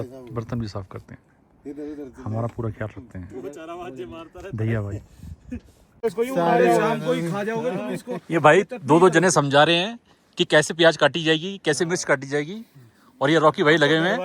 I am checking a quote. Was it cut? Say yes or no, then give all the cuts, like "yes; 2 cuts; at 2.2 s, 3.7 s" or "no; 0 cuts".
yes; 1 cut; at 5.8 s